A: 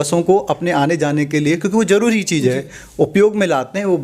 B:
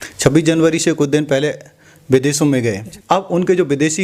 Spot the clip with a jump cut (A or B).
B